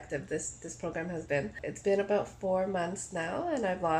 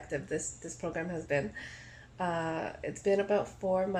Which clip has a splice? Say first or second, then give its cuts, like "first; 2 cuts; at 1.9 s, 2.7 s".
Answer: first; 1 cut; at 1.6 s